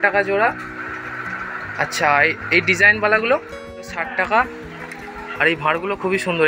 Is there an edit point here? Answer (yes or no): yes